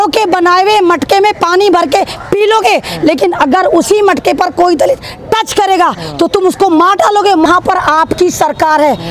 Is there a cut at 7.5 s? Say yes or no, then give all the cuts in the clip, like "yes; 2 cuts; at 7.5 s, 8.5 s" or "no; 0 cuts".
yes; 1 cut; at 7.5 s